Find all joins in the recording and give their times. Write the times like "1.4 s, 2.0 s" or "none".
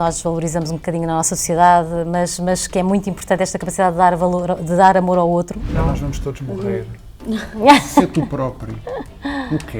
5.6 s